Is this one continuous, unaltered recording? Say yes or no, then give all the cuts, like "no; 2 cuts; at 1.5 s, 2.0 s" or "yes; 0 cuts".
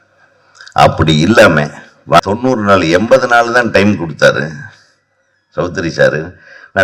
no; 1 cut; at 2.2 s